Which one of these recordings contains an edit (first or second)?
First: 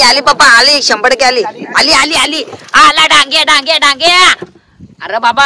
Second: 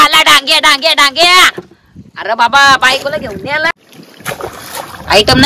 second